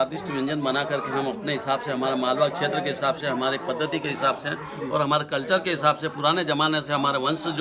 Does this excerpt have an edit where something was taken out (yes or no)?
no